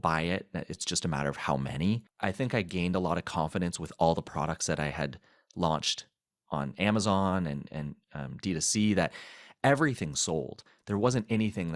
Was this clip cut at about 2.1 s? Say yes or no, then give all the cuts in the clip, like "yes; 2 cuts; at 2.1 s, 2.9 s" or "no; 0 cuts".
yes; 1 cut; at 2.1 s